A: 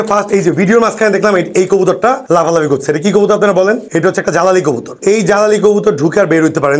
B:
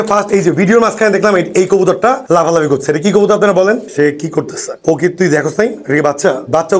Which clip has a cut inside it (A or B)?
B